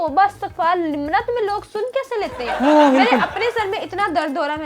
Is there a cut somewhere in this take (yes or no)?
no